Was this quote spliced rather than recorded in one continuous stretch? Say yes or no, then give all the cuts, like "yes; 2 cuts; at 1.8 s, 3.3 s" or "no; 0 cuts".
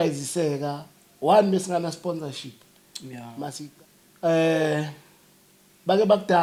yes; 1 cut; at 3.7 s